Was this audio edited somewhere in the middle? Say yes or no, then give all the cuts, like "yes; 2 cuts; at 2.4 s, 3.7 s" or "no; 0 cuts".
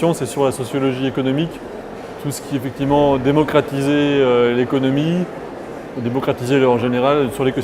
yes; 1 cut; at 3.0 s